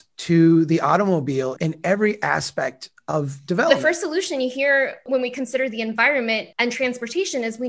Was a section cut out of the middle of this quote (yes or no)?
yes